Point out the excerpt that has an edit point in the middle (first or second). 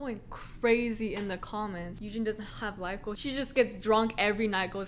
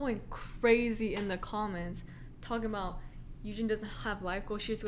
first